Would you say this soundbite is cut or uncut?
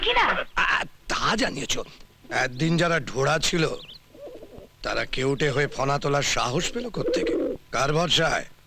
cut